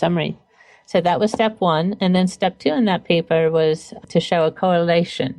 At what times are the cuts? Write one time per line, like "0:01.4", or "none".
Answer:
0:03.9